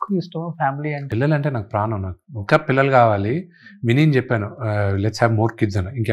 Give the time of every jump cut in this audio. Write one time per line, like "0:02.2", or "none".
0:01.0